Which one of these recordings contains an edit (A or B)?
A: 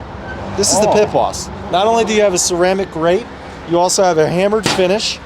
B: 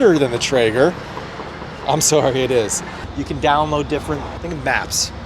B